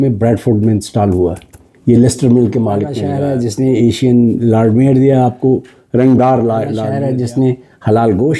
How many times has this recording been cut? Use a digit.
2